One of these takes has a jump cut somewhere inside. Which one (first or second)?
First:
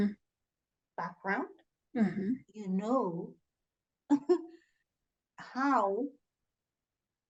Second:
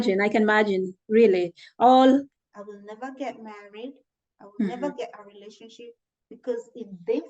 second